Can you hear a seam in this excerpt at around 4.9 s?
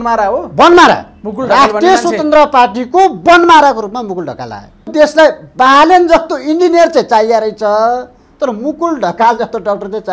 yes; 1 cut; at 4.9 s

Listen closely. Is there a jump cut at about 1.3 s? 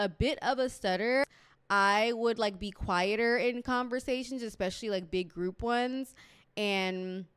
yes; 1 cut; at 1.3 s

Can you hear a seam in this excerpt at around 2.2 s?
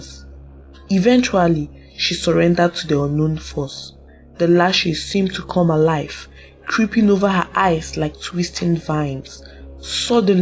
no; 0 cuts

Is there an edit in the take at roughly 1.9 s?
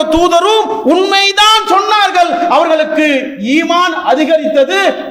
no; 0 cuts

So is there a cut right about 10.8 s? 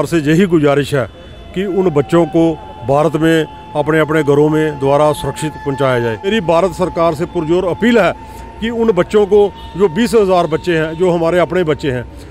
no; 1 cut; at 6.3 s

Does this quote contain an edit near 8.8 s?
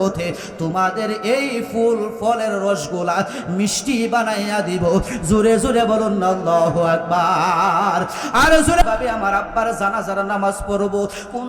yes; 1 cut; at 8.8 s

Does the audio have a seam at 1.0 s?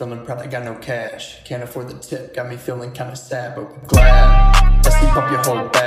no; 1 cut; at 4.7 s

